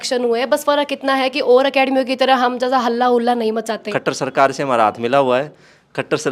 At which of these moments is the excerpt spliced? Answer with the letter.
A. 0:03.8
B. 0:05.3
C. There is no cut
A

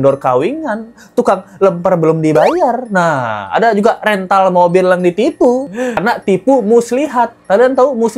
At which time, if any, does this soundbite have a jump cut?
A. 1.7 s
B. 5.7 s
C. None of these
B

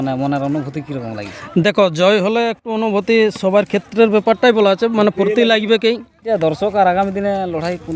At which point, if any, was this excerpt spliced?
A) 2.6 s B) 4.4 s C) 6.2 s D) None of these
C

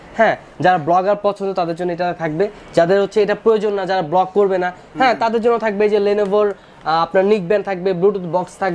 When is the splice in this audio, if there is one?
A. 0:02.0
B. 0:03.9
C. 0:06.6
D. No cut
D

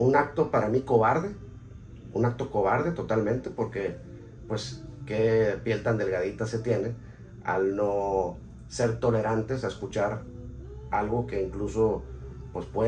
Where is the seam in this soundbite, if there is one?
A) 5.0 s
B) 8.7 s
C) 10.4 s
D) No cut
D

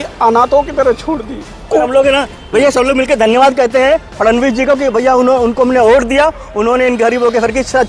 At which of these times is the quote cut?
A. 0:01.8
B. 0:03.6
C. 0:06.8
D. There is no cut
A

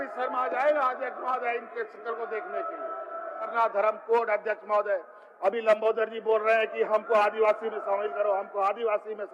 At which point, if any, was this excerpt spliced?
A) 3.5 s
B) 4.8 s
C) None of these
A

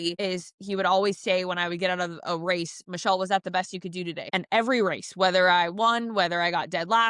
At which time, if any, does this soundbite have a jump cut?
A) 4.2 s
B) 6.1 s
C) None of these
A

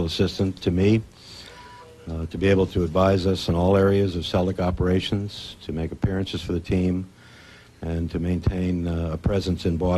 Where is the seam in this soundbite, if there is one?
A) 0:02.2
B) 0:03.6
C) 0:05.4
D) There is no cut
B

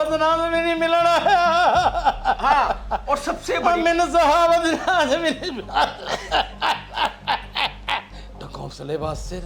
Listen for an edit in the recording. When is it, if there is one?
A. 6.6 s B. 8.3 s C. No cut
B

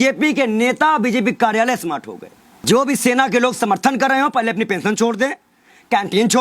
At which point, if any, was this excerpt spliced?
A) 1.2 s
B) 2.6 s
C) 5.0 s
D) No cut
B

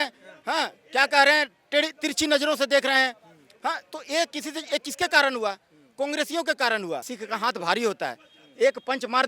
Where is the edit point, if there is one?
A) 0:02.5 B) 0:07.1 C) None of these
B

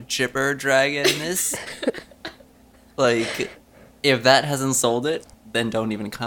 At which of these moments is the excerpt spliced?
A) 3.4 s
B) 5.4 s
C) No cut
B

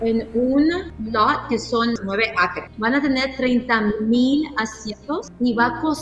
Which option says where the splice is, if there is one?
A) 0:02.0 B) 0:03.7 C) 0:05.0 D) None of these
A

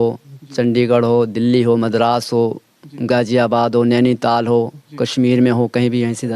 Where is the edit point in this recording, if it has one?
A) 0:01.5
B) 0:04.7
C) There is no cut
C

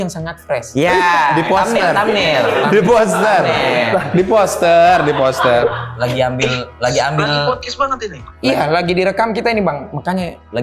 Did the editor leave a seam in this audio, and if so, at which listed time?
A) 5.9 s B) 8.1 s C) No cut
A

